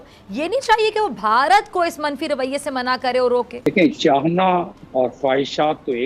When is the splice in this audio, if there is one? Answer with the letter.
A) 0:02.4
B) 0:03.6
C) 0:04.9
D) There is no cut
B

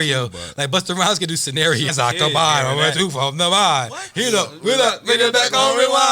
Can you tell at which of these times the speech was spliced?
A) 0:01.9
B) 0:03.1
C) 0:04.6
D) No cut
A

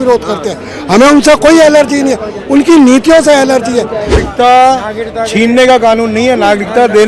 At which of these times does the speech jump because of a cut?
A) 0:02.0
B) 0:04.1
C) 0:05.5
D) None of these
B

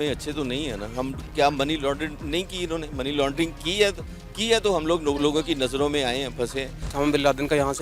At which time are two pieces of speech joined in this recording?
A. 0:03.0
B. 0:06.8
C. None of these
B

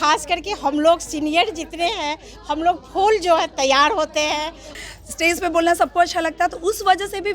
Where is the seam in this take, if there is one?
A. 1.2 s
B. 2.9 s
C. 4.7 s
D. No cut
C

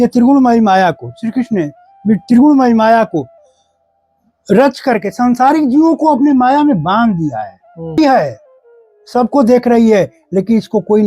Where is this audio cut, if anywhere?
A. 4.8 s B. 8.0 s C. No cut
B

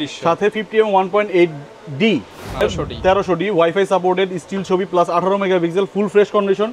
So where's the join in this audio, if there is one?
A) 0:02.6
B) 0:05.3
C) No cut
A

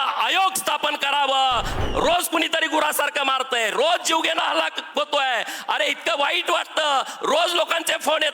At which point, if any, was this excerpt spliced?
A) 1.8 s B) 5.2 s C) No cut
A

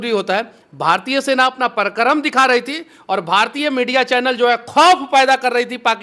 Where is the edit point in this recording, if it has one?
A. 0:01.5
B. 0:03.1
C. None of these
C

